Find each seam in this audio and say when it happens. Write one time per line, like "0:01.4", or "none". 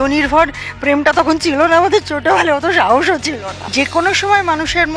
0:03.5